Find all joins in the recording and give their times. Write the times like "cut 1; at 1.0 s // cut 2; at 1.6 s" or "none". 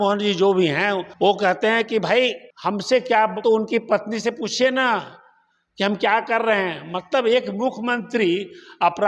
cut 1; at 1.1 s // cut 2; at 2.5 s // cut 3; at 3.4 s

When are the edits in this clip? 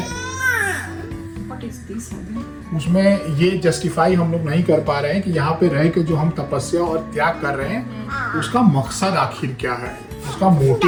none

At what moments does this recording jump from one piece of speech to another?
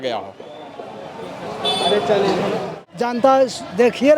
cut 1; at 2.7 s

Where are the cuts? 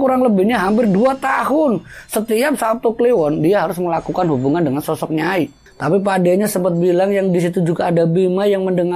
cut 1; at 5.6 s

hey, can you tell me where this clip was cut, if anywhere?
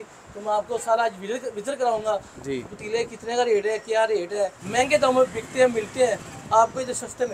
cut 1; at 4.6 s

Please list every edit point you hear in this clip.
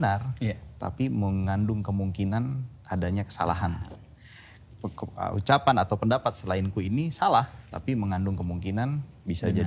none

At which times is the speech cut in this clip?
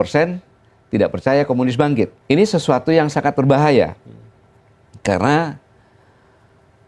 cut 1; at 2.2 s

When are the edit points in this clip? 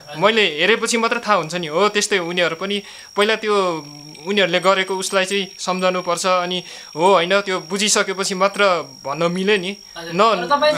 none

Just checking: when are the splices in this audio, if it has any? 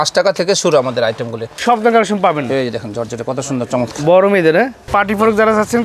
cut 1; at 1.5 s // cut 2; at 4.9 s

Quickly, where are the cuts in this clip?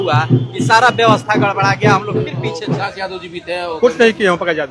cut 1; at 2.9 s

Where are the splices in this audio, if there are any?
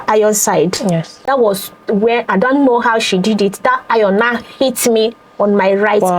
cut 1; at 1.3 s

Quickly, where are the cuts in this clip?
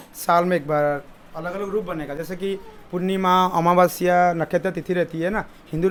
none

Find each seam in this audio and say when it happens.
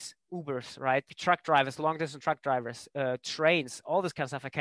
cut 1; at 1.1 s

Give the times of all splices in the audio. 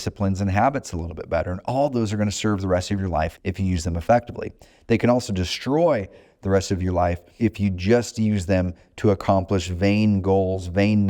cut 1; at 3.4 s // cut 2; at 7.3 s

